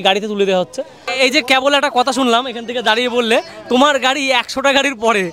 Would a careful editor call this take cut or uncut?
cut